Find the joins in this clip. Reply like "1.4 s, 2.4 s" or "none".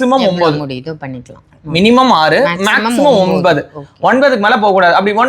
none